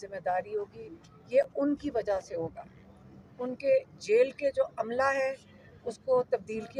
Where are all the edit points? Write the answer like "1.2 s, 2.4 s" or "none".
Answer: none